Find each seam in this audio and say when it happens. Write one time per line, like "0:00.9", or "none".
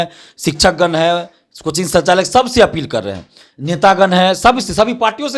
none